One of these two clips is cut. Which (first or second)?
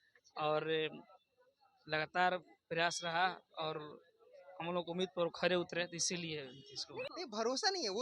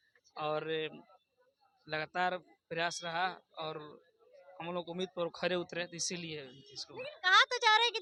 first